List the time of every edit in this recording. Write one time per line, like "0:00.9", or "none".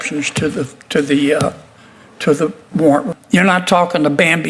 0:03.1

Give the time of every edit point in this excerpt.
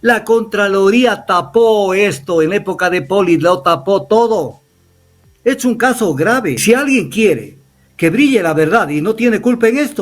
0:06.6

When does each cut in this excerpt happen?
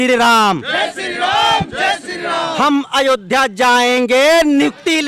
none

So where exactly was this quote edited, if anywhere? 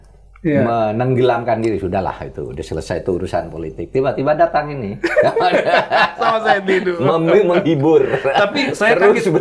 none

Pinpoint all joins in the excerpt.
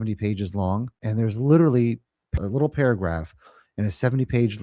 0:01.0
0:02.3

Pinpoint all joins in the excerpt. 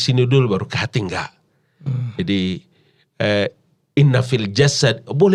none

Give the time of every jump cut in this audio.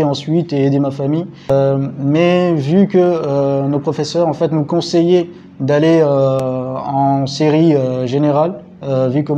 0:01.5
0:06.4

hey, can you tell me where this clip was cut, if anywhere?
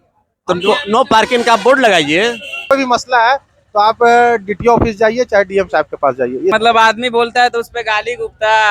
0:02.7
0:06.5

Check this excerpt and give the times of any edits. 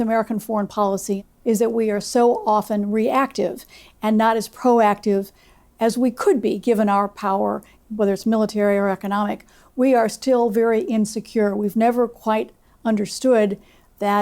0:01.3
0:07.8

